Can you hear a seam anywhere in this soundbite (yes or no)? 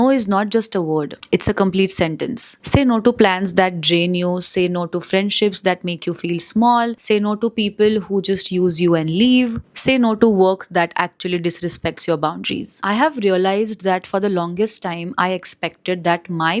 no